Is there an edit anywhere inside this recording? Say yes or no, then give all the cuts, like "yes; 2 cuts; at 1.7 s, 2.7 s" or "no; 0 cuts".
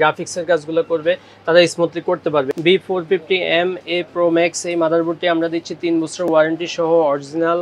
yes; 1 cut; at 2.5 s